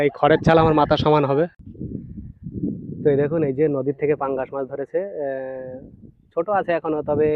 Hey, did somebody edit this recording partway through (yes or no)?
yes